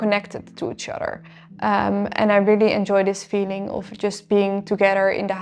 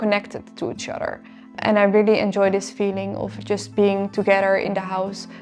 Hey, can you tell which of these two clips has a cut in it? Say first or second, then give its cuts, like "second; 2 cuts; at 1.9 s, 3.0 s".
second; 1 cut; at 1.6 s